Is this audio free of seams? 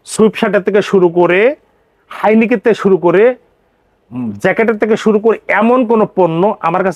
yes; 0 cuts

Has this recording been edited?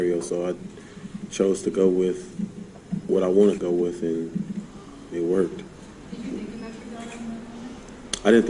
yes; 1 cut; at 3.6 s

